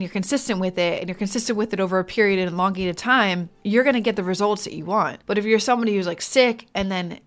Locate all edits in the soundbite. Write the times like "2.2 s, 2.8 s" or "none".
3.5 s, 5.2 s